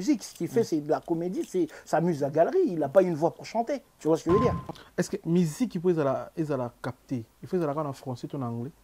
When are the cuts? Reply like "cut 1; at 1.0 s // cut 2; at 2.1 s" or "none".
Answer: cut 1; at 4.7 s